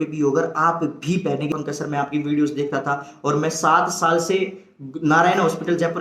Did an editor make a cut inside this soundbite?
yes; 1 cut; at 1.5 s

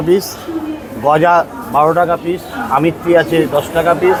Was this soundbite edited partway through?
no; 0 cuts

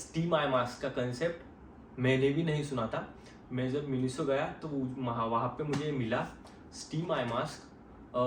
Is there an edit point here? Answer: no; 0 cuts

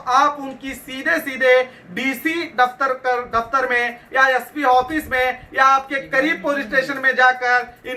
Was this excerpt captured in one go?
yes; 0 cuts

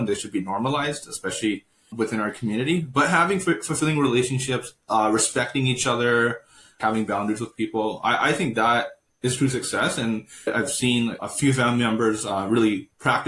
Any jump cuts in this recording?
no; 0 cuts

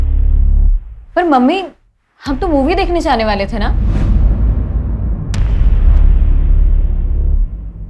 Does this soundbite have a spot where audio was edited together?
no; 0 cuts

